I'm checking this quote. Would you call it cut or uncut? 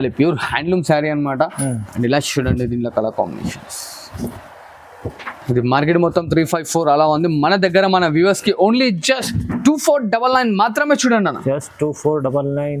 uncut